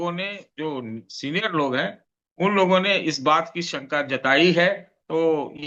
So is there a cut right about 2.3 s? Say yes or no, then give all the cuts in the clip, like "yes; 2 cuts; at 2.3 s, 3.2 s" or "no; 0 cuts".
no; 0 cuts